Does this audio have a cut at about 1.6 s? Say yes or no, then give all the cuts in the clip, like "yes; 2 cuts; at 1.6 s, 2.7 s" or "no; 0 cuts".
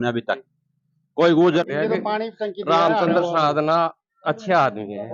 yes; 1 cut; at 1.6 s